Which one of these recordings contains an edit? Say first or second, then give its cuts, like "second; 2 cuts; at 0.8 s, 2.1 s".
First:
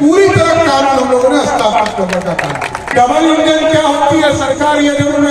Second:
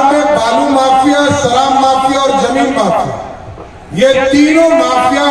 first; 1 cut; at 2.9 s